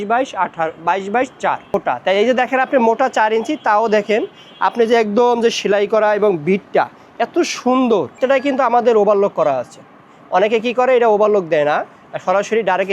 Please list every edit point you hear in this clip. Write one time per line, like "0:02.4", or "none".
0:01.6
0:08.2